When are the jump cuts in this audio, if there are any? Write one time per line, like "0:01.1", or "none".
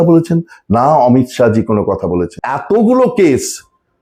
0:02.4